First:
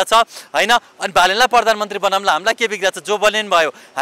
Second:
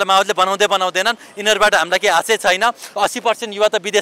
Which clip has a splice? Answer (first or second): second